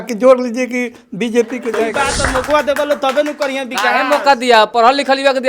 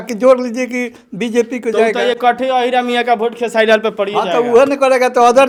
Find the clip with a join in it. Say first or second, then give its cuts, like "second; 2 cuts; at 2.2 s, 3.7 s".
first; 1 cut; at 1.9 s